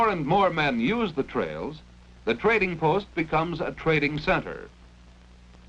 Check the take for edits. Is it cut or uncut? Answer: cut